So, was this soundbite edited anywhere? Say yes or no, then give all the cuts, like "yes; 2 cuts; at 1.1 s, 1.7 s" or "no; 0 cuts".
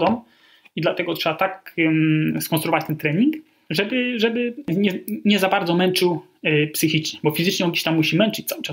yes; 3 cuts; at 1.6 s, 3.5 s, 4.7 s